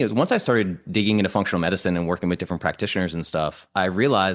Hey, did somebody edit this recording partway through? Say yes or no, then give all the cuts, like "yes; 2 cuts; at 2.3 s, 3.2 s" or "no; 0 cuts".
no; 0 cuts